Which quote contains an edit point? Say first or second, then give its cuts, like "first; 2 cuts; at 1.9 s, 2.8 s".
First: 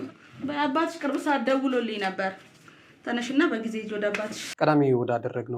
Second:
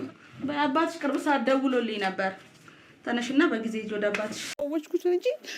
second; 1 cut; at 4.5 s